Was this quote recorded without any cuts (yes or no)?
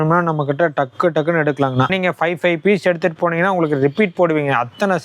no